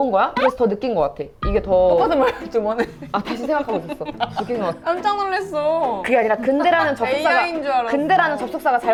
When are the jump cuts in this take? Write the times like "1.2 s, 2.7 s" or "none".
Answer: none